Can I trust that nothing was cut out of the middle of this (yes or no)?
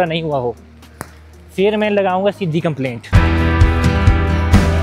no